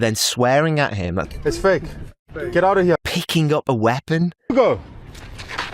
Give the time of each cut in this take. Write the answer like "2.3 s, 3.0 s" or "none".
1.2 s, 3.0 s